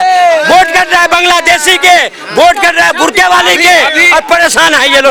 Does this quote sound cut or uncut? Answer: uncut